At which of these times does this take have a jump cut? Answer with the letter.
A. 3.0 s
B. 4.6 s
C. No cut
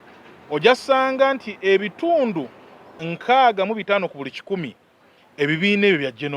A